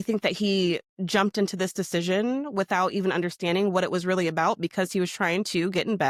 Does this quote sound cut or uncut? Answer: uncut